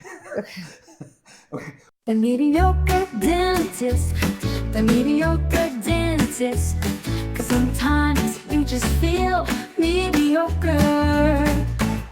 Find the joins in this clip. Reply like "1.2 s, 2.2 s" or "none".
1.8 s

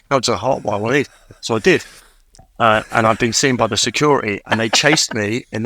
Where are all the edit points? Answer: none

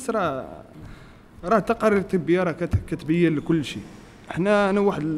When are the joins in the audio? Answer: none

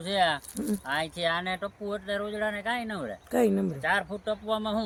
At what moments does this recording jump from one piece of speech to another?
none

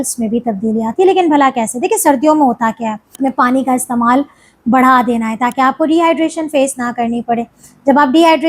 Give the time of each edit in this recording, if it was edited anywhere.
3.1 s

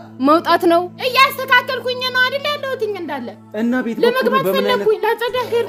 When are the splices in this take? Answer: none

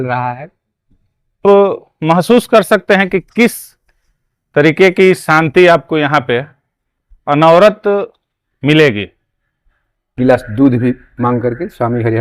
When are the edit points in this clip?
1.4 s, 10.1 s

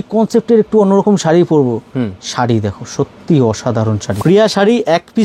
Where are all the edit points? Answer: 4.1 s

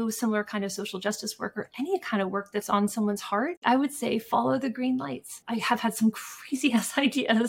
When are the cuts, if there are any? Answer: 5.4 s

